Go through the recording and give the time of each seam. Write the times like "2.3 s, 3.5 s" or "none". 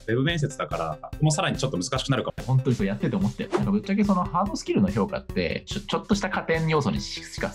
2.4 s, 3.4 s